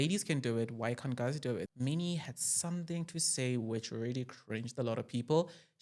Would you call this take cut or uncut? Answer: cut